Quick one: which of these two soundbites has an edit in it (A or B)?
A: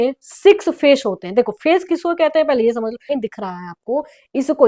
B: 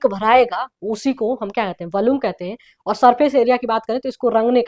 A